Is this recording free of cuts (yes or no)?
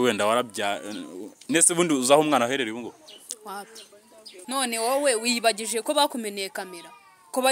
no